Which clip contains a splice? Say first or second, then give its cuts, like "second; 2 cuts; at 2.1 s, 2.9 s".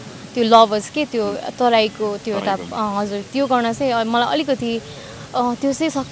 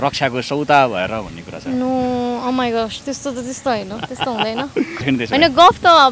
second; 1 cut; at 5.0 s